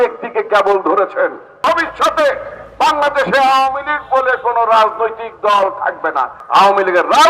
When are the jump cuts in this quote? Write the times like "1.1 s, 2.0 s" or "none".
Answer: 1.5 s, 6.4 s